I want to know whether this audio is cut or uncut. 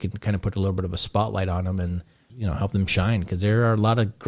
uncut